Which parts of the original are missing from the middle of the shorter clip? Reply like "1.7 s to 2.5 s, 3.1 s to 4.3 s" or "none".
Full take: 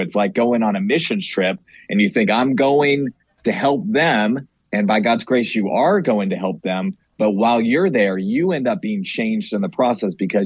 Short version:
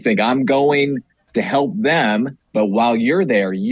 4.5 s to 7.1 s